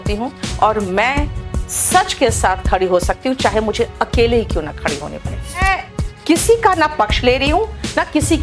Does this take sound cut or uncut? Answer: cut